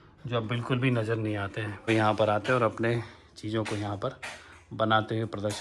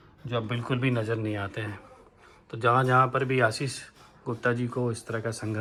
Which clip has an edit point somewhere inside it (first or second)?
first